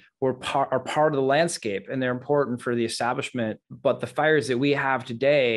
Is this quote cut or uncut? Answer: uncut